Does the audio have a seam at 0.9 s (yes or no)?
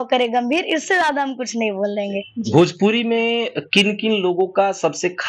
no